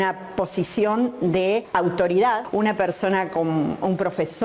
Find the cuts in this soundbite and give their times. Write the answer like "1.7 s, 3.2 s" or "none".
1.7 s, 2.4 s